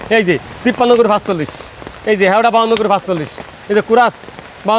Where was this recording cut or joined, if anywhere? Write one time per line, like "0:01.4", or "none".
none